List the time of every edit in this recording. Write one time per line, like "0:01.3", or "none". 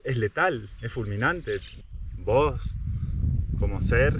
0:01.8